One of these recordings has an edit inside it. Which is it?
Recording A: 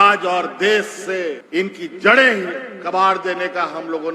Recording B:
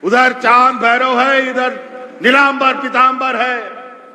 A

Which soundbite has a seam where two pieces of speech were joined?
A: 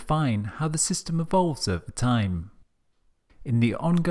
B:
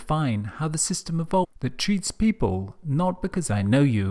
A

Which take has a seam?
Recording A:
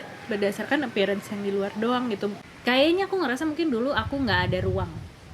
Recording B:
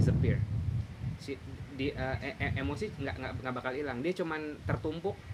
A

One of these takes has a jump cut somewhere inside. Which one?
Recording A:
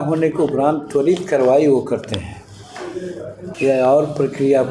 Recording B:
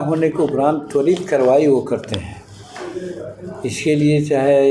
A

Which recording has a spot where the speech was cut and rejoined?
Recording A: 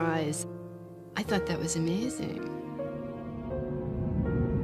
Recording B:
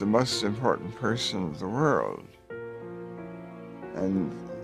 A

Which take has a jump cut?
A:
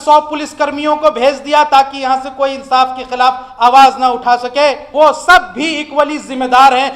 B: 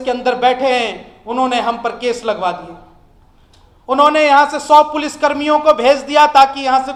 A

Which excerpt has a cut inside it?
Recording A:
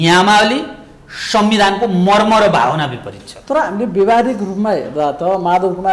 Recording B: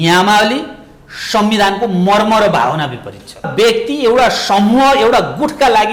B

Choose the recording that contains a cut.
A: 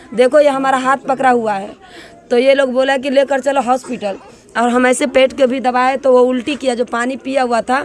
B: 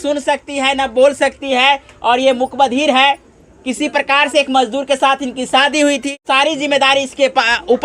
B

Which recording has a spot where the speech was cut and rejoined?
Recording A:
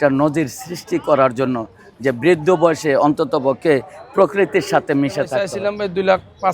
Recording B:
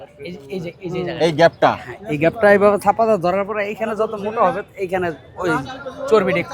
A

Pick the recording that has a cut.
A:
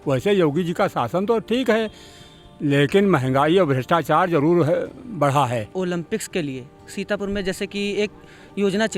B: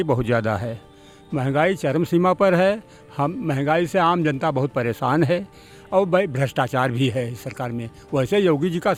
A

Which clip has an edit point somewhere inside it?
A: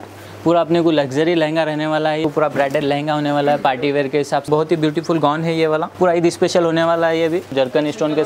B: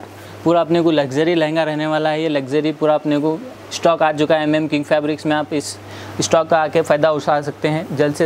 A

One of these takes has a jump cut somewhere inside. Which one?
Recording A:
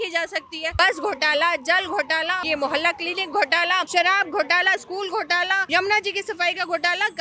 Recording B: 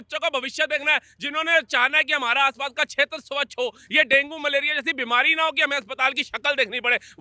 A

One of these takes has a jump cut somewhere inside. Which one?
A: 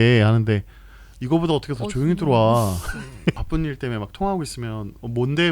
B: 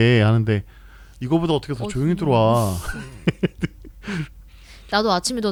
A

